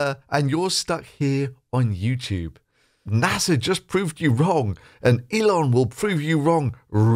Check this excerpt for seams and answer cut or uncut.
cut